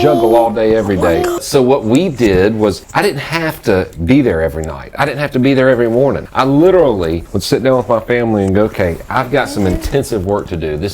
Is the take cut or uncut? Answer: cut